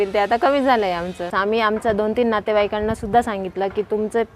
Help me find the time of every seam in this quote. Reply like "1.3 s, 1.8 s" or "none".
1.3 s